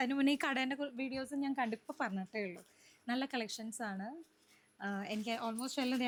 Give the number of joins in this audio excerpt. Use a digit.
0